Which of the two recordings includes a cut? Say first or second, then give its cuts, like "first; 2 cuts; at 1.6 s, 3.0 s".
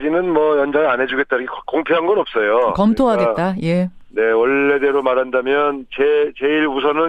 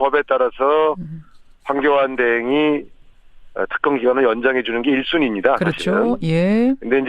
second; 1 cut; at 5.1 s